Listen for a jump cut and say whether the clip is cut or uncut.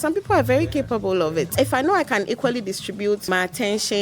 cut